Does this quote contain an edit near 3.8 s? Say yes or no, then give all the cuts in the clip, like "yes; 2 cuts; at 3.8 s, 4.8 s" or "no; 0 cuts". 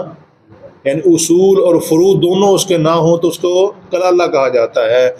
no; 0 cuts